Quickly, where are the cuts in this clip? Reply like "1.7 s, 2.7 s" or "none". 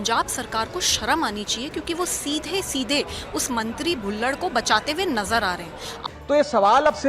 5.9 s